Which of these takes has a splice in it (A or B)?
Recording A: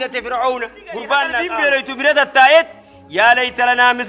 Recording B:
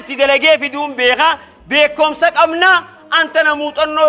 A